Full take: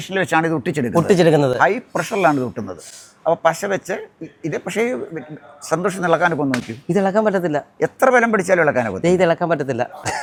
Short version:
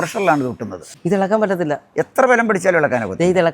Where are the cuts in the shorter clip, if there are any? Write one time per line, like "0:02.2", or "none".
0:00.9